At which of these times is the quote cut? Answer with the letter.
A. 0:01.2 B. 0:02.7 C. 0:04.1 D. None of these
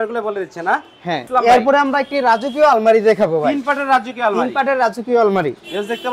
A